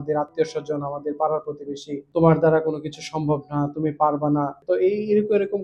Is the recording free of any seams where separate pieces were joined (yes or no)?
no